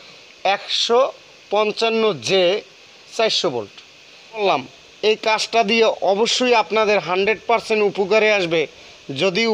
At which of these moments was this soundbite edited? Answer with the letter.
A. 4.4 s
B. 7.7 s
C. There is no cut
A